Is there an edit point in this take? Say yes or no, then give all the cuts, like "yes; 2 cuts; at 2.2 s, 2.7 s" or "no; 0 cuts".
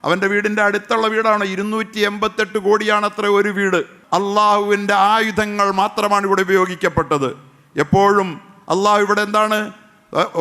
yes; 1 cut; at 4.0 s